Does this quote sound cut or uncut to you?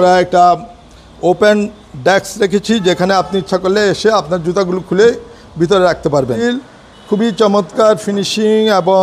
cut